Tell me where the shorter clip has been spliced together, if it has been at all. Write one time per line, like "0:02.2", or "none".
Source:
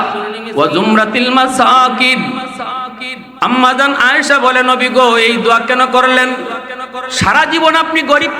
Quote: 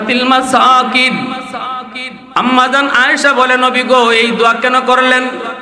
none